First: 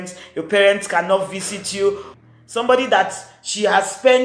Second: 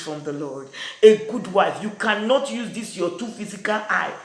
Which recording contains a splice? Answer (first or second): first